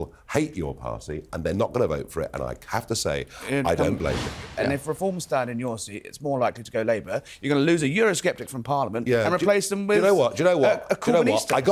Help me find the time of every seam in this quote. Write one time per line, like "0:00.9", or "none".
0:04.3